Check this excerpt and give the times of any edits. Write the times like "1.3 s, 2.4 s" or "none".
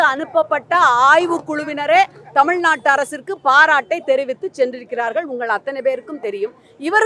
none